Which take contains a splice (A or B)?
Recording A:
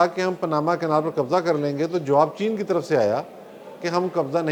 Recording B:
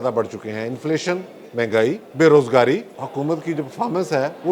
B